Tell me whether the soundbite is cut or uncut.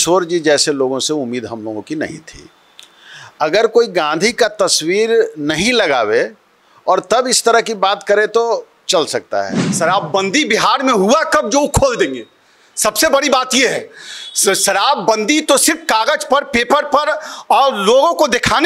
cut